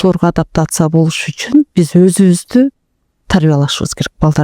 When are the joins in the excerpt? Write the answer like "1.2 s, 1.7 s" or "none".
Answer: 1.7 s